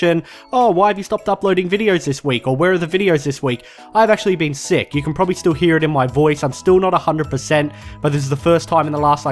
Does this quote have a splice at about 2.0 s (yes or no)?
yes